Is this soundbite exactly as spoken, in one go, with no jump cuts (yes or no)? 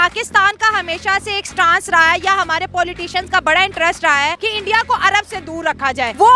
yes